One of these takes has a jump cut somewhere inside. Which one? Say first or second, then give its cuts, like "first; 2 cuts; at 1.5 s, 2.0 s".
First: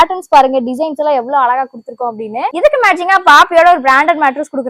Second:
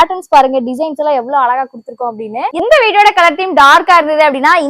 second; 1 cut; at 2.6 s